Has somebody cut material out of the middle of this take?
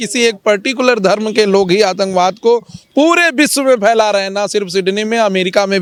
no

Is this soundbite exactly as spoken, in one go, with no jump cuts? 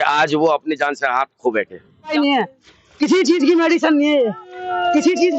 no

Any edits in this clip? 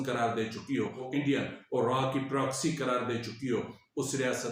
yes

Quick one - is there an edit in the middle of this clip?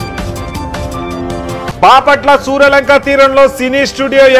yes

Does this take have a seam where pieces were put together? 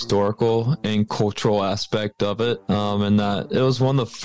yes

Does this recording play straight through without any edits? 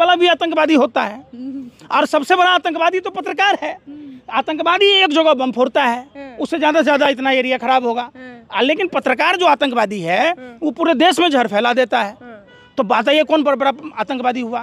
yes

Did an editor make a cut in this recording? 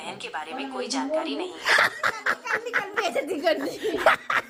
no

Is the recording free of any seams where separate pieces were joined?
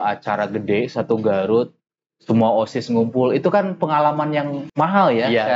no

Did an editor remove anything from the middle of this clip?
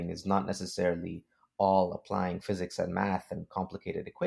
no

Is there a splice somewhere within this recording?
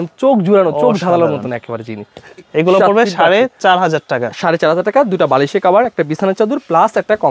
no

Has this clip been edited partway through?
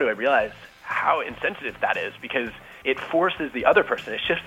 yes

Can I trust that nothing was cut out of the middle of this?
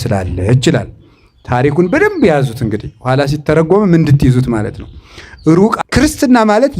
no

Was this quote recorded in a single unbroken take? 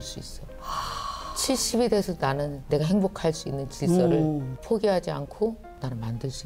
yes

